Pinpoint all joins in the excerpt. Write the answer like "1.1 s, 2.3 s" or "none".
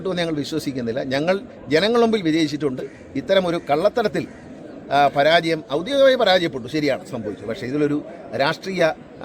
none